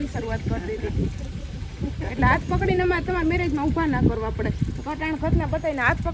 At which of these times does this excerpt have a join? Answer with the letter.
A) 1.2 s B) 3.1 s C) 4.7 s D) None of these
D